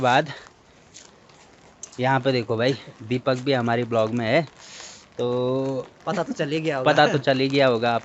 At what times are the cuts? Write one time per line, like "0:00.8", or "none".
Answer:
none